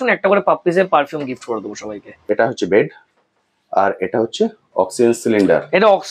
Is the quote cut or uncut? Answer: cut